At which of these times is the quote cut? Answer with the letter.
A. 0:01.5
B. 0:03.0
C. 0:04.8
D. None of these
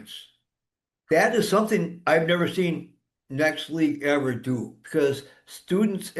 C